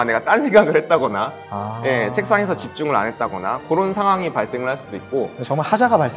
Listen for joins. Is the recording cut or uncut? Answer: uncut